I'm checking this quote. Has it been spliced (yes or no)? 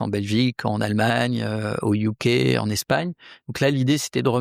no